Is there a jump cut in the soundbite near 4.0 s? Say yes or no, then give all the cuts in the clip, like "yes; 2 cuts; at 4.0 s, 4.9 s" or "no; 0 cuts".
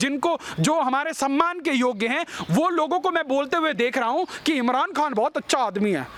no; 0 cuts